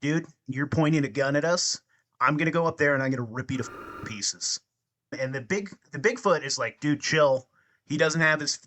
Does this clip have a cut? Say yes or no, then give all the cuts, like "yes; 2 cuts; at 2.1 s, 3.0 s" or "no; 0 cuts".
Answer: yes; 1 cut; at 5.1 s